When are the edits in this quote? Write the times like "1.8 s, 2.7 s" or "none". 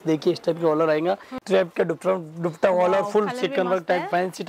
1.4 s